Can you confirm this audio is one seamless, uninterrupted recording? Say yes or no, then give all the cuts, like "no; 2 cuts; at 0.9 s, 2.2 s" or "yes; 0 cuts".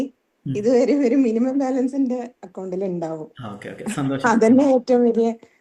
yes; 0 cuts